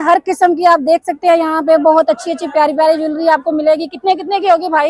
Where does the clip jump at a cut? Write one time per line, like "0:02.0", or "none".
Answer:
none